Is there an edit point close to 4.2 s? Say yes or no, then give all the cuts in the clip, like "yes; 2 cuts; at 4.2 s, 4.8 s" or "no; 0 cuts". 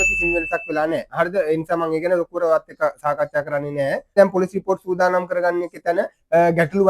yes; 1 cut; at 4.2 s